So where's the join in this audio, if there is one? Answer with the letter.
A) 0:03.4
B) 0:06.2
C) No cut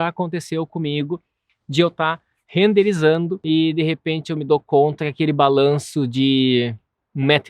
A